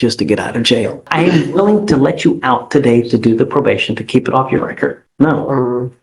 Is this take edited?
yes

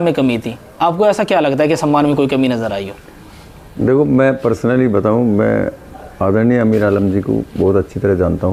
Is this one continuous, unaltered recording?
yes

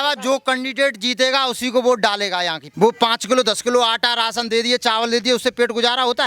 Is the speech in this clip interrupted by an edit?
yes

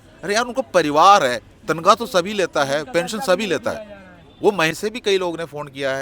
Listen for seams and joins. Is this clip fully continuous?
no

